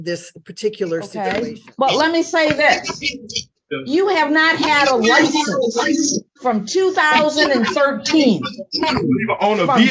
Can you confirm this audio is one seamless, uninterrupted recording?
no; 1 cut; at 1.1 s

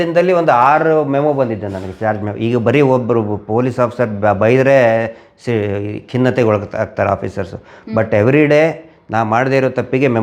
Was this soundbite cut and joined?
no; 0 cuts

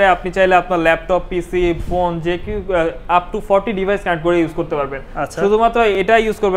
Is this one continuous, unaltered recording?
yes; 0 cuts

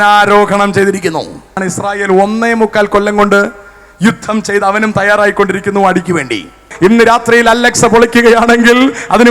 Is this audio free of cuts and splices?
no; 2 cuts; at 1.7 s, 6.6 s

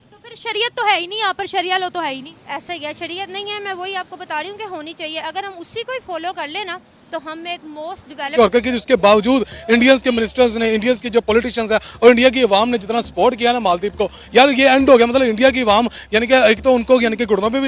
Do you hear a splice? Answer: yes; 1 cut; at 8.3 s

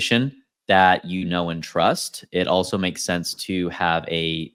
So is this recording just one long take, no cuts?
yes; 0 cuts

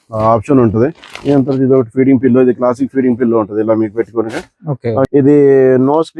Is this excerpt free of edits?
no; 1 cut; at 5.1 s

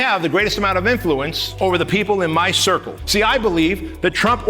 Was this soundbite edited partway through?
yes; 2 cuts; at 1.4 s, 3.0 s

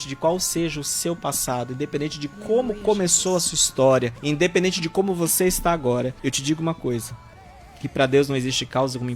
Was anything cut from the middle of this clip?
yes; 2 cuts; at 4.1 s, 6.2 s

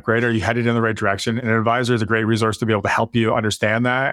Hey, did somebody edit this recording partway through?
no; 0 cuts

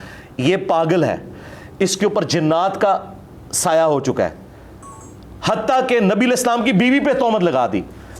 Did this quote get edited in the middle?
no; 0 cuts

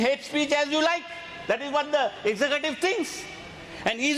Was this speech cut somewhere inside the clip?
no; 0 cuts

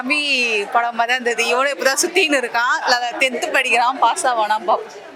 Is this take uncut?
yes; 0 cuts

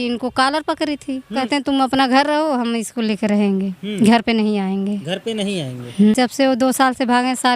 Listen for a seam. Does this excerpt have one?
yes; 2 cuts; at 1.4 s, 6.1 s

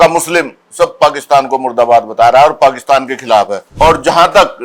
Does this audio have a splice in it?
yes; 1 cut; at 3.6 s

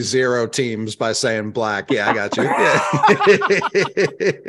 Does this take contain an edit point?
no; 0 cuts

